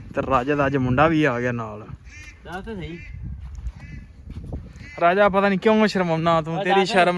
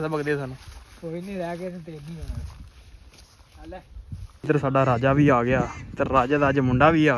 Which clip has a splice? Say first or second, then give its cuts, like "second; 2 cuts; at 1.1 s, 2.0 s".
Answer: second; 1 cut; at 4.3 s